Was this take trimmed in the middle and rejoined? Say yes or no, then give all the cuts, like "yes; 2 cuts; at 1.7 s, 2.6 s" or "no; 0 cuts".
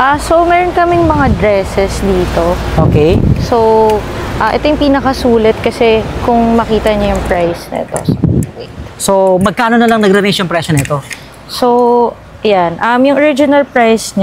no; 0 cuts